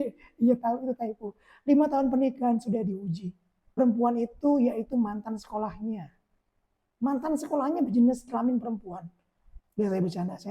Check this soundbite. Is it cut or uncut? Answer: cut